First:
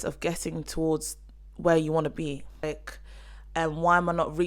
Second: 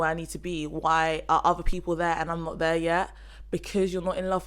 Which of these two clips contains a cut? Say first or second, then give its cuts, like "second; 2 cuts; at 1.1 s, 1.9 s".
first; 1 cut; at 2.6 s